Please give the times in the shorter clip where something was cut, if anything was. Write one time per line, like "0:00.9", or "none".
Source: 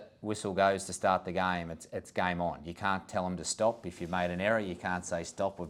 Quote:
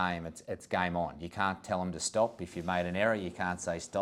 none